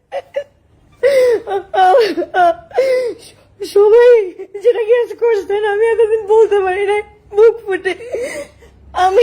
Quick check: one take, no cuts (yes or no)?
yes